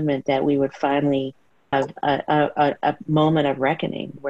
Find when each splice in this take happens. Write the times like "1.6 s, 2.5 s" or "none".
1.7 s